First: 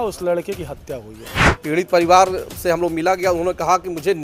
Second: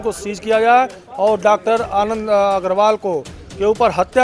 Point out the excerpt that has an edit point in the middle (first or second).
first